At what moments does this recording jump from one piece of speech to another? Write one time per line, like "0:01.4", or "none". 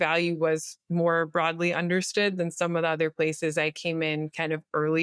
none